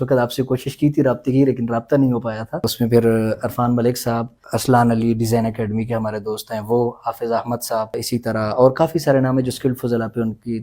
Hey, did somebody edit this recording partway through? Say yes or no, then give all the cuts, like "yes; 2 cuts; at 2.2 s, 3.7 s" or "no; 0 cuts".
yes; 3 cuts; at 2.7 s, 4.4 s, 8.0 s